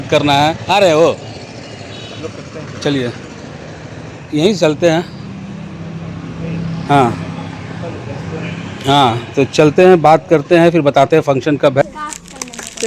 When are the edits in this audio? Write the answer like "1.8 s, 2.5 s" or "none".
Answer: 11.8 s